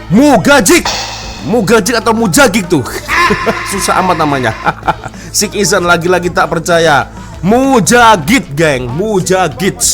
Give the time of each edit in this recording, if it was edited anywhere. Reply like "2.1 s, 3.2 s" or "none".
none